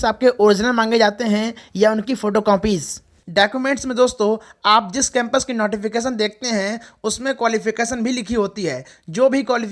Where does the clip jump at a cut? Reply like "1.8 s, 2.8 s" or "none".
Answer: none